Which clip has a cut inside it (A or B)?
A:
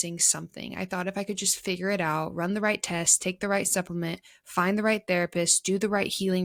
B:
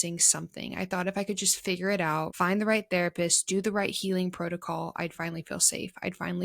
B